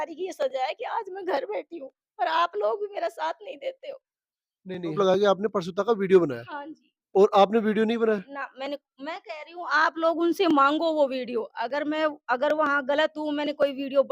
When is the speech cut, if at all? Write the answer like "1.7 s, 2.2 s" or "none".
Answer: 5.0 s